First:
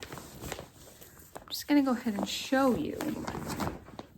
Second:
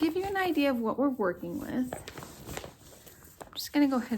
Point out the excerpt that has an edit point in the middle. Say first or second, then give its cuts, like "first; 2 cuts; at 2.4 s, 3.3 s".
first; 1 cut; at 3.1 s